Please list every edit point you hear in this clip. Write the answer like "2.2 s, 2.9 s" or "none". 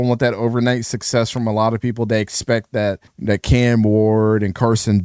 3.1 s